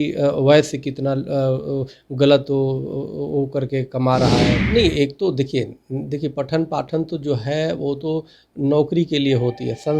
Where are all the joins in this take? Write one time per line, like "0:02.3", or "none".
0:04.5